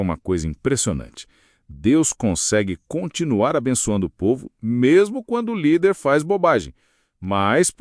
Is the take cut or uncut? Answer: uncut